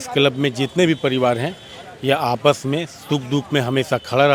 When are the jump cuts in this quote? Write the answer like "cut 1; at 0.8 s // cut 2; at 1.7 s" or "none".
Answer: none